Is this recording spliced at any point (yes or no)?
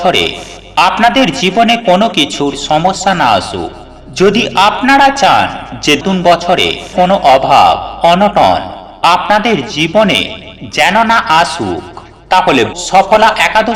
yes